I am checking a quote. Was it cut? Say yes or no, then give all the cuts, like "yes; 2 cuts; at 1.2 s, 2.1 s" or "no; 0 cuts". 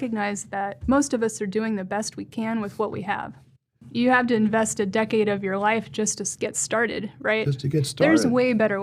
yes; 1 cut; at 3.9 s